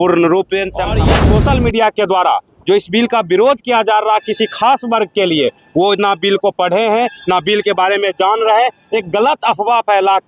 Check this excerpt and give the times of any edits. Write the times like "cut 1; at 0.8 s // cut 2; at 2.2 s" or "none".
cut 1; at 1.1 s